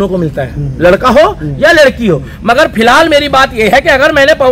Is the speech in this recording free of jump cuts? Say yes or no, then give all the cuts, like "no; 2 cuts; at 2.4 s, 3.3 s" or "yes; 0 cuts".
yes; 0 cuts